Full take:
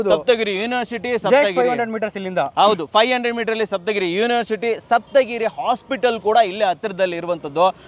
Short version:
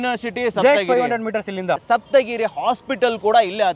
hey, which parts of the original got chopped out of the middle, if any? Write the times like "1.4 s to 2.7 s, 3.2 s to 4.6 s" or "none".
2.5 s to 4.8 s

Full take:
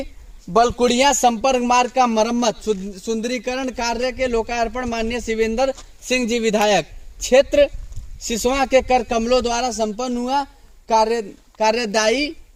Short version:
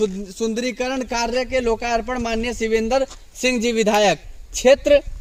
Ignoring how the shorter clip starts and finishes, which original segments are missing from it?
none

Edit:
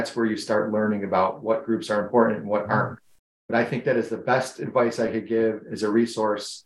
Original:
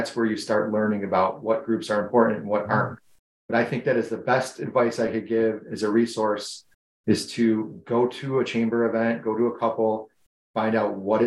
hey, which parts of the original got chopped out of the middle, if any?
none

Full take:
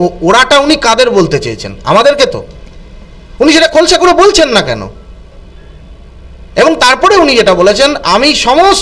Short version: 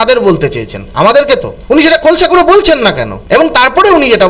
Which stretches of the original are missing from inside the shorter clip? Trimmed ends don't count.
2.4 s to 3.2 s, 4.8 s to 6.4 s

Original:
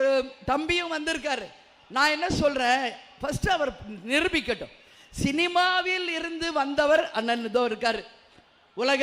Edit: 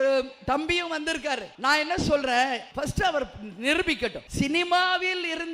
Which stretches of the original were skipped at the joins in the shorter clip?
1.5 s to 1.8 s, 3.0 s to 3.1 s, 4.7 s to 5.1 s

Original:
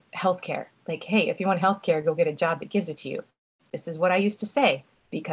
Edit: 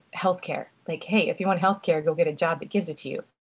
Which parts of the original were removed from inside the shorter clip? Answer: none

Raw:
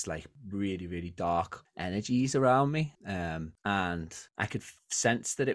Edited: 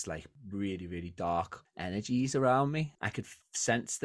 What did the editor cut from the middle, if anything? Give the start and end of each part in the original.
3.0 s to 4.3 s

